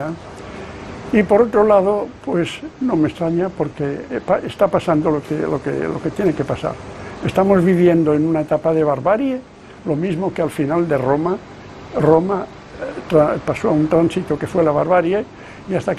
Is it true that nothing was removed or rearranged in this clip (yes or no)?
yes